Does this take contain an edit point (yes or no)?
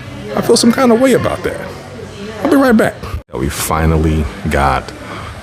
yes